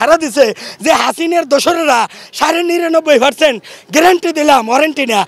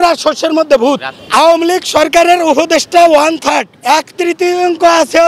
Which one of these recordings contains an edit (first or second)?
second